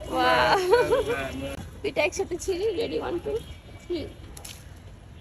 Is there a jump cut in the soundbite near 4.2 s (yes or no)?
no